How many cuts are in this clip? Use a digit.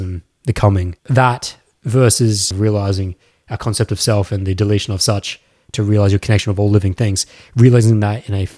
2